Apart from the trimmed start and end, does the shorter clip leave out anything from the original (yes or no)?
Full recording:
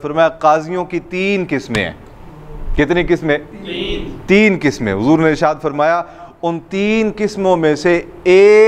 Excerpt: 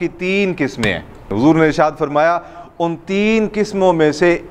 yes